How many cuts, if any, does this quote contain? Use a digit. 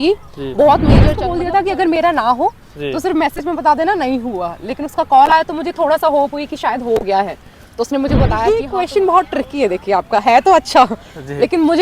2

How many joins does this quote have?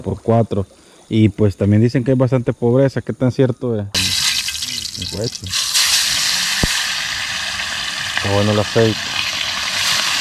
1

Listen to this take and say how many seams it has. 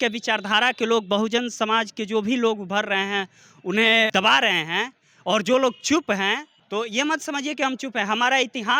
2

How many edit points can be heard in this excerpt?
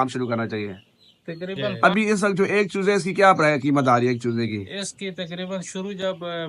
1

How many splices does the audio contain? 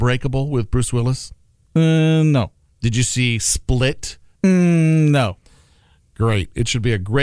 1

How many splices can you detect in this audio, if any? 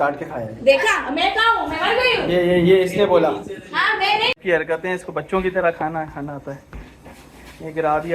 1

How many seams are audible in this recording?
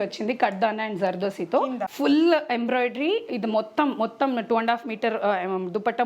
1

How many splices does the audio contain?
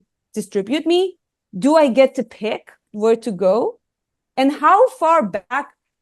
1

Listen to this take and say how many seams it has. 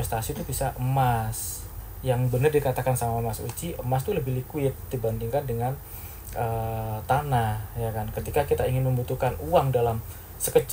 0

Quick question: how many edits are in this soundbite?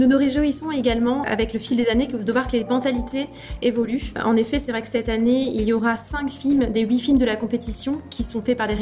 2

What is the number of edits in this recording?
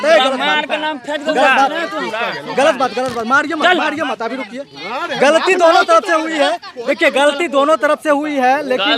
0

